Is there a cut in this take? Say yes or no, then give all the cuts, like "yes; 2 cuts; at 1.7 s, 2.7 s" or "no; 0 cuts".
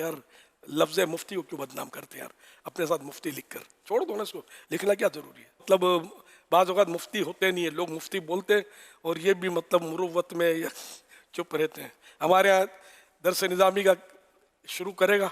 yes; 1 cut; at 5.6 s